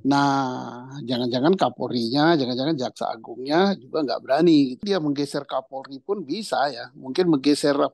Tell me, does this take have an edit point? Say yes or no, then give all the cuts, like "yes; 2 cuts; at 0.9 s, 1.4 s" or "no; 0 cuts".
yes; 1 cut; at 4.8 s